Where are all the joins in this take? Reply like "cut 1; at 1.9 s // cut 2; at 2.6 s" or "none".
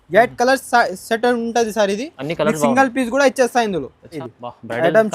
cut 1; at 4.2 s